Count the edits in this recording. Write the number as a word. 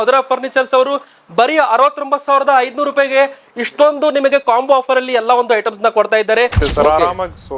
one